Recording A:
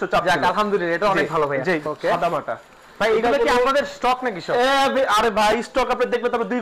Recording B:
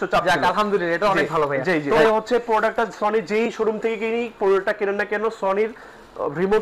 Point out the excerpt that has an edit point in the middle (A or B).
A